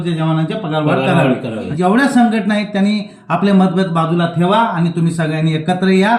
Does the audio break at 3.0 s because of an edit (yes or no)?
no